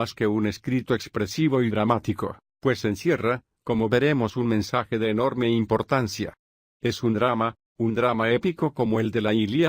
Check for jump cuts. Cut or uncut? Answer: cut